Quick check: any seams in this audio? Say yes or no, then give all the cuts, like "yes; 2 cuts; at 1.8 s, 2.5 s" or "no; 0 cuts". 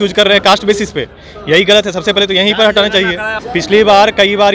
yes; 1 cut; at 3.3 s